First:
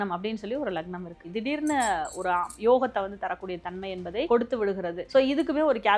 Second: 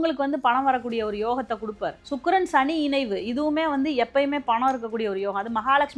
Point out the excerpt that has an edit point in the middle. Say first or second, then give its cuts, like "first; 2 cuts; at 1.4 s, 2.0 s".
first; 3 cuts; at 1.3 s, 4.3 s, 5.0 s